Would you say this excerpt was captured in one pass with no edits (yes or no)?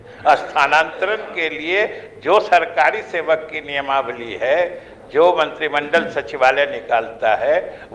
yes